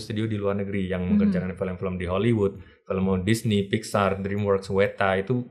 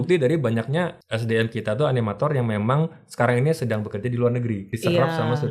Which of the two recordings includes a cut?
second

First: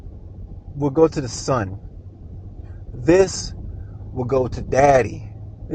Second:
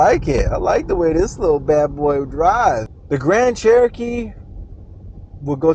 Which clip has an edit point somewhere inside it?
second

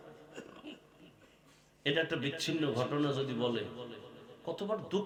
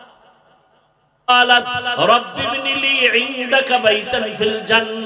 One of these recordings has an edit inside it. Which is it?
second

